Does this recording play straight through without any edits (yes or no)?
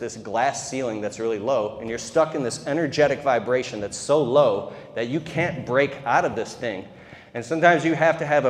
yes